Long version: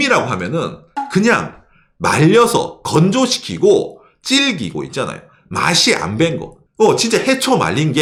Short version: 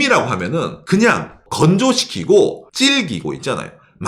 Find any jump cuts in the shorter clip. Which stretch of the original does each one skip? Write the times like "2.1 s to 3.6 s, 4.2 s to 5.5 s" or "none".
0.8 s to 1.1 s, 1.7 s to 2.8 s, 4.0 s to 4.1 s